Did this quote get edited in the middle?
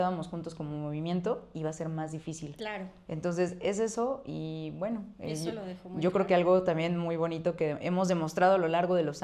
no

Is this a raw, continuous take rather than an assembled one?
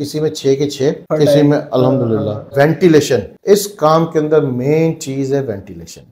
no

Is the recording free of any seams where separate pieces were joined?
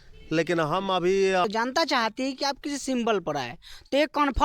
no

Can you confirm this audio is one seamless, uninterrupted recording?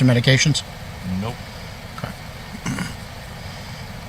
yes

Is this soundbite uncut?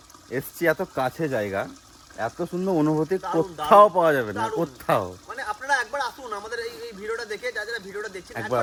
yes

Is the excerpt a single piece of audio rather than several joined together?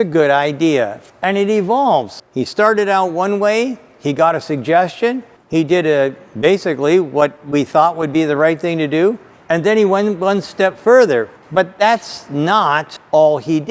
yes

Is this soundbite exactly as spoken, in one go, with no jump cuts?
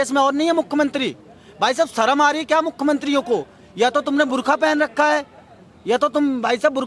yes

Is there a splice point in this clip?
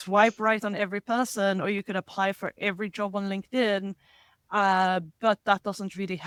no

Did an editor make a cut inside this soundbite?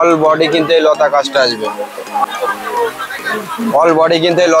yes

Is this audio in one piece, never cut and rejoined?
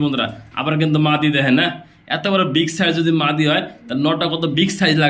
yes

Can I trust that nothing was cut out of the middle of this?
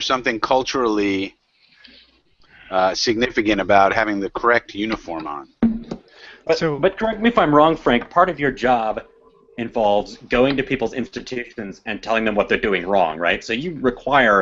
no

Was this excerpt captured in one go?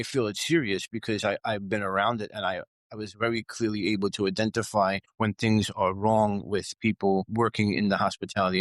yes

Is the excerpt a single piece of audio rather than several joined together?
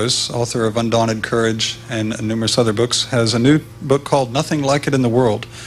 no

